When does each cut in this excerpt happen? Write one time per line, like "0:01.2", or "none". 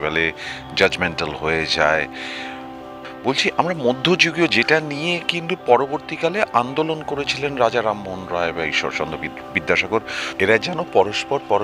0:03.0
0:10.2